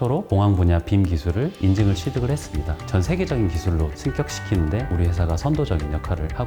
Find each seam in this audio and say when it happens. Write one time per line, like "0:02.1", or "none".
0:02.8